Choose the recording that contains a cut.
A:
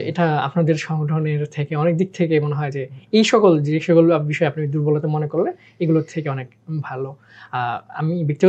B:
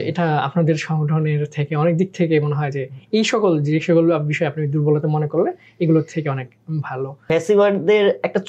B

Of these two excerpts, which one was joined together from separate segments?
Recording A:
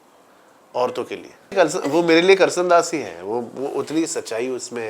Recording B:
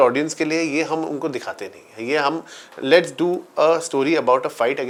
A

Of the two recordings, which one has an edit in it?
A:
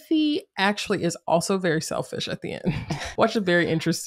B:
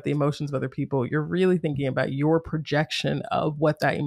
A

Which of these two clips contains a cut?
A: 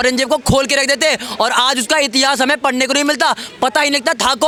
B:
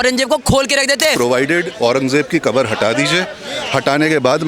B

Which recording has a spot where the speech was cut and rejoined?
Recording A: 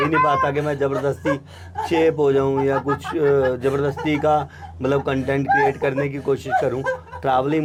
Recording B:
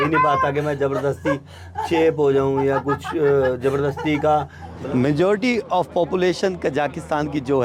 B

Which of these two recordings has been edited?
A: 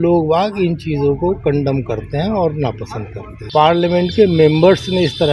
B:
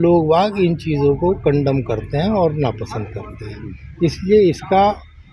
A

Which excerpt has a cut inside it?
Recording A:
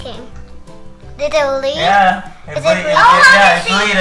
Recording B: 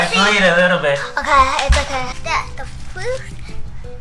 B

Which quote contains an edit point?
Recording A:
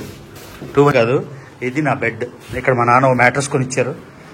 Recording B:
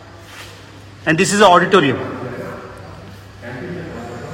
A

